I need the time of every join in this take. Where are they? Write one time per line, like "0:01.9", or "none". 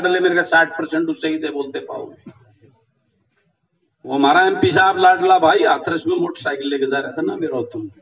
none